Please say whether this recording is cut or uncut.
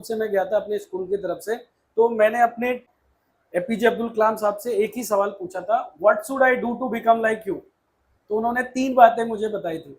cut